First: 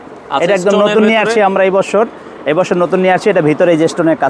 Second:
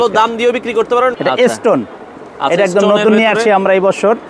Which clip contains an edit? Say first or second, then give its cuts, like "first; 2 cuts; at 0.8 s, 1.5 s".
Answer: second; 1 cut; at 1.1 s